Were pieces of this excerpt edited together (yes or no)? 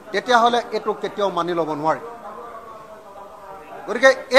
no